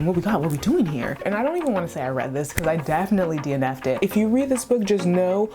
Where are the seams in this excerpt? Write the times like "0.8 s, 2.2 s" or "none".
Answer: 1.2 s, 4.0 s